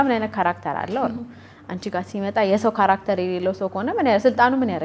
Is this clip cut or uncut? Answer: uncut